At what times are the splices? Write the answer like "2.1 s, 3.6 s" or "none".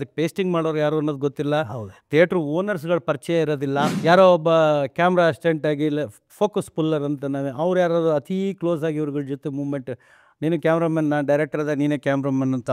3.9 s